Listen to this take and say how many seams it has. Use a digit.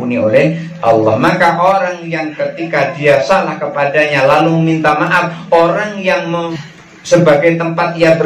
1